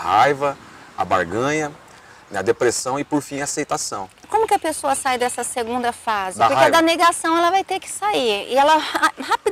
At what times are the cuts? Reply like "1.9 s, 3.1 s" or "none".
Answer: none

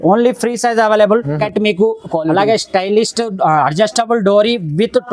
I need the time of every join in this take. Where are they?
1.4 s

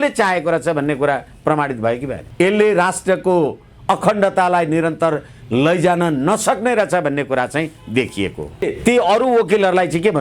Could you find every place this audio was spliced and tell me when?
2.2 s, 8.6 s

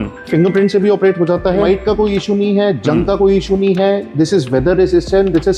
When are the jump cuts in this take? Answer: 1.6 s

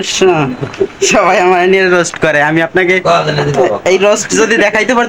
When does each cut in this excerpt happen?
none

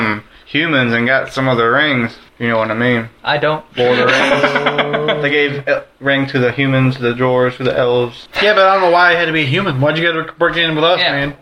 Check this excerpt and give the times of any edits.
2.2 s, 3.1 s, 8.2 s

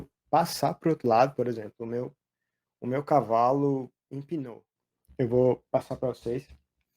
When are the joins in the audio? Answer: 4.4 s

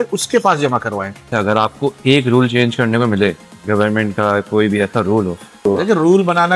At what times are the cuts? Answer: 1.2 s, 5.6 s

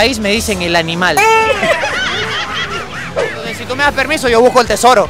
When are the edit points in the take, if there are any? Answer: 3.3 s

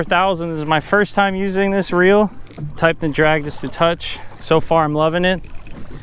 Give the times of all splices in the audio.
none

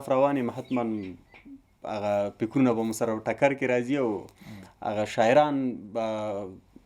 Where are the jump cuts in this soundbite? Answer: none

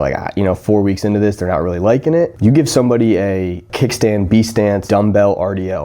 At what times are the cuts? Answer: 2.3 s, 3.7 s, 4.8 s

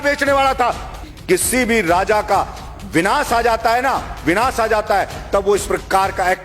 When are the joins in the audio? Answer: 1.1 s

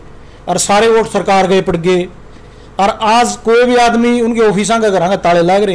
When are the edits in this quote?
none

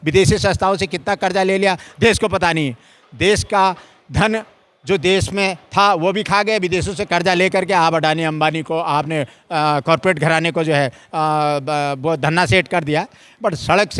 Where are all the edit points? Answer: none

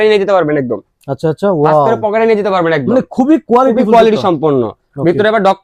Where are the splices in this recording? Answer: none

